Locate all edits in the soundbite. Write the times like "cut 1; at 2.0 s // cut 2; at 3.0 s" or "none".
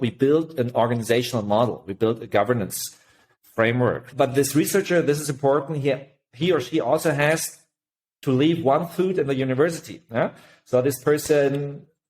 cut 1; at 4.1 s

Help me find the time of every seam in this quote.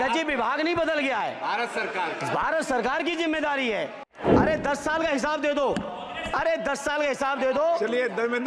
cut 1; at 4.1 s

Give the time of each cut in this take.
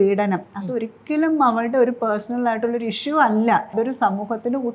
cut 1; at 3.7 s

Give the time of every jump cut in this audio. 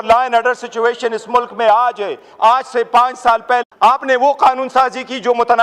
cut 1; at 3.7 s

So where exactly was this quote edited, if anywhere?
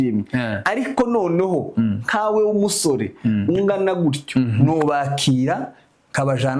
cut 1; at 4.6 s

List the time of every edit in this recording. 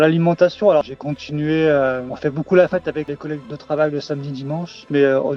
cut 1; at 0.9 s // cut 2; at 3.2 s

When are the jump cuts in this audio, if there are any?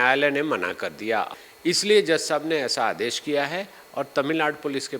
cut 1; at 1.3 s

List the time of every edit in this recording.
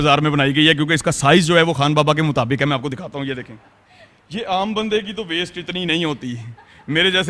none

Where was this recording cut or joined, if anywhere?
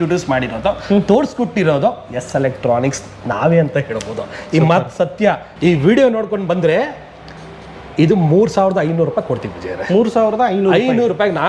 cut 1; at 5.5 s

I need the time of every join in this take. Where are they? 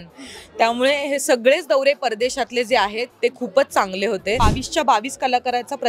cut 1; at 4.4 s

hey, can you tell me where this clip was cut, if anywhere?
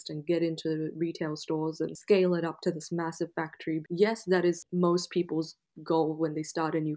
cut 1; at 2.0 s // cut 2; at 3.8 s // cut 3; at 4.6 s

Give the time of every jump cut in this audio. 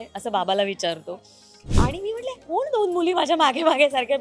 cut 1; at 1.6 s

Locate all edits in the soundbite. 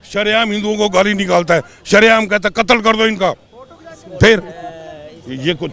none

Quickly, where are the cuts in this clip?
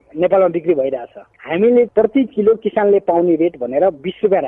none

